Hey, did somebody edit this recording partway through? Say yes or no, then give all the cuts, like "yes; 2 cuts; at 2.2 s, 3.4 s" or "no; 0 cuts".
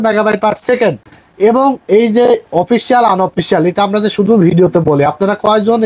no; 0 cuts